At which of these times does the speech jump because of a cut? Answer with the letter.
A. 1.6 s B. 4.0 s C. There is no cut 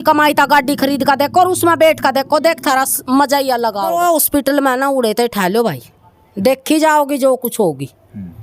B